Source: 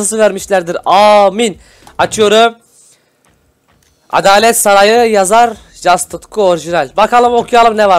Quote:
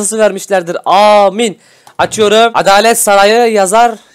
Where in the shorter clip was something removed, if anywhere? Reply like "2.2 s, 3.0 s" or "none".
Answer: 2.5 s